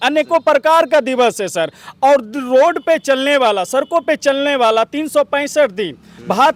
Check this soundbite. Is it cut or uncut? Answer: uncut